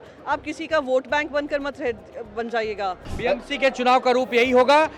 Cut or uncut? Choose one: cut